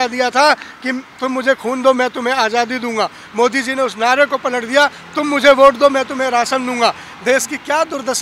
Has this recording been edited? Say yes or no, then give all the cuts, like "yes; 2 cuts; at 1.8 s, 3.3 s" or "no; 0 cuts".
no; 0 cuts